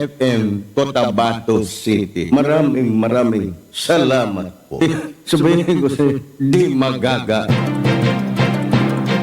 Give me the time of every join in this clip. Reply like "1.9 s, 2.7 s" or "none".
7.4 s